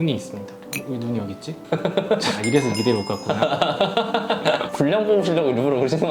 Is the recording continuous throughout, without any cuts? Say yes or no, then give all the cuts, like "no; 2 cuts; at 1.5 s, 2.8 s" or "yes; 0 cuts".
yes; 0 cuts